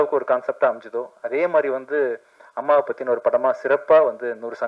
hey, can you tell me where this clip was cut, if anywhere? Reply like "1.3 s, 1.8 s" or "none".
none

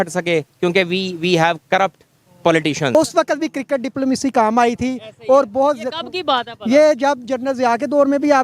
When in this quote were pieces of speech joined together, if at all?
2.9 s

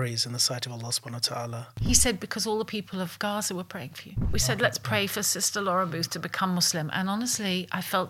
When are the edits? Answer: 1.8 s, 4.3 s

